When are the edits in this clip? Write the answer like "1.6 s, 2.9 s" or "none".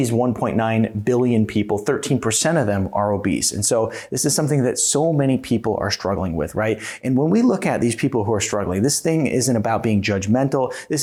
none